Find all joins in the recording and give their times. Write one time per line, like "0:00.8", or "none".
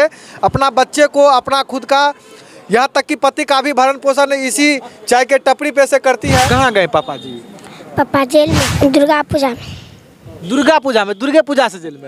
0:06.5
0:08.7